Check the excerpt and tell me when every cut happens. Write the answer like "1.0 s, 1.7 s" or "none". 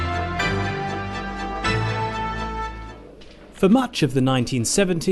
1.6 s